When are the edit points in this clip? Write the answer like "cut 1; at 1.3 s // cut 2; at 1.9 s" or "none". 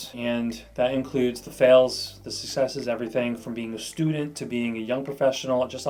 none